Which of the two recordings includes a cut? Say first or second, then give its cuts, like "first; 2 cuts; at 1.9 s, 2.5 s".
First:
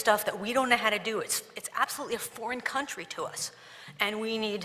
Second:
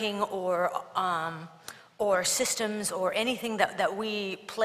second; 1 cut; at 2.3 s